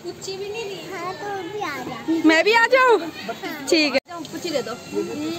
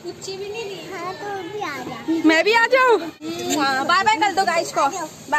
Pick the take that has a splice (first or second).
second